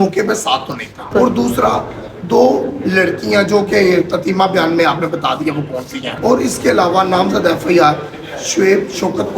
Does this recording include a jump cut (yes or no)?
yes